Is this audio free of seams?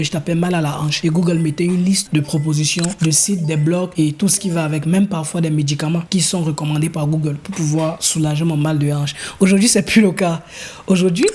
no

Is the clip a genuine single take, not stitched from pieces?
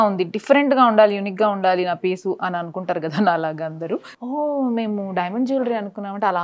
no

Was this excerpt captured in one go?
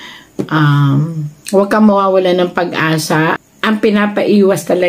no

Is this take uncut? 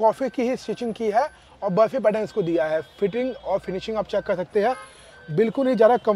yes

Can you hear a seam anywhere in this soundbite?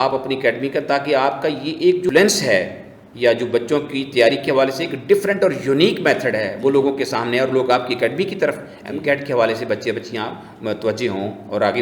yes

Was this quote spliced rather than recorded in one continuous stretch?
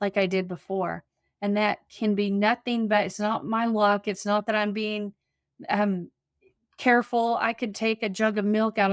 no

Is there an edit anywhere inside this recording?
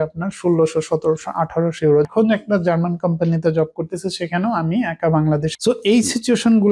yes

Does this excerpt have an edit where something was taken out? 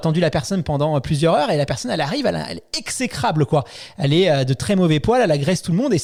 no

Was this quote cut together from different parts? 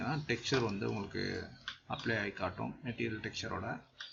no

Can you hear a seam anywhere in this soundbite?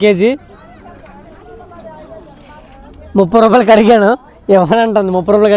no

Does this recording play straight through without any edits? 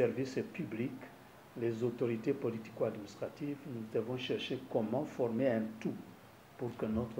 yes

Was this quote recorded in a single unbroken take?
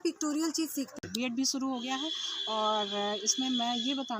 no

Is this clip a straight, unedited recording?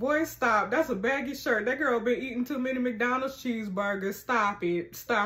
yes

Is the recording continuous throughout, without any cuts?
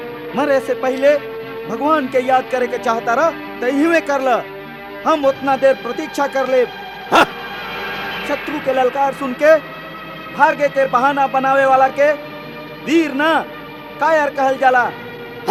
yes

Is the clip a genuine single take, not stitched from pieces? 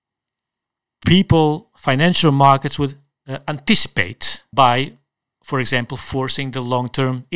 no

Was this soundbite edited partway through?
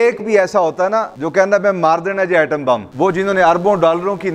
yes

